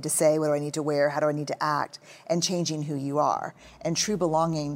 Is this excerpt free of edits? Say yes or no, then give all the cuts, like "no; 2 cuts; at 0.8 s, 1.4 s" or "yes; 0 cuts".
yes; 0 cuts